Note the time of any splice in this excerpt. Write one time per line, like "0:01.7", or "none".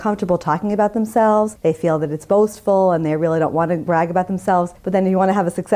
0:01.5
0:03.8
0:04.8